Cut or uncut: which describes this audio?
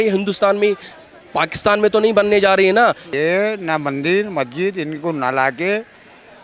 cut